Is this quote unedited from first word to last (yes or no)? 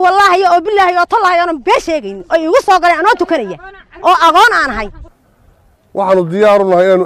no